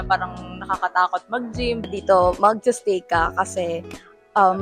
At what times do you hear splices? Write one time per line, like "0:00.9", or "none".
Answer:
0:01.9